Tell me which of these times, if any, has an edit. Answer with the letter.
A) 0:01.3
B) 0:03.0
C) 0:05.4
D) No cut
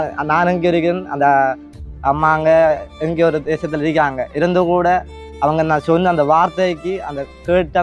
D